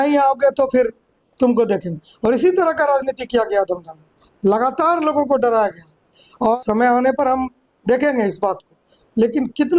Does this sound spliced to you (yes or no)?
yes